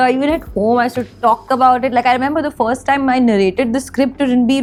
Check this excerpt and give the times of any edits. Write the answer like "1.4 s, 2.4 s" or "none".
none